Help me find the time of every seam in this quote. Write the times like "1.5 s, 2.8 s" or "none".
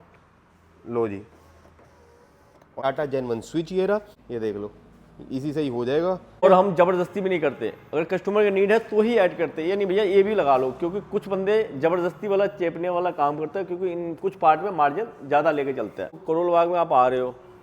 2.8 s, 6.4 s, 16.1 s